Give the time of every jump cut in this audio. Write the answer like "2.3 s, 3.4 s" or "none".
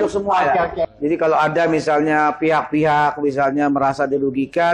0.9 s